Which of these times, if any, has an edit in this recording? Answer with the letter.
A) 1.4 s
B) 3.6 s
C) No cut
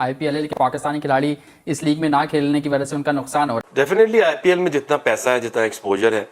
B